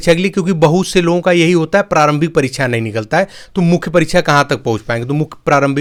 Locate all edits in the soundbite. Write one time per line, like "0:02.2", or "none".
none